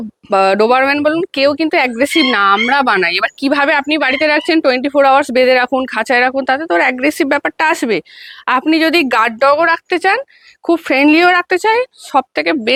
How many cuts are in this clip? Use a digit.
0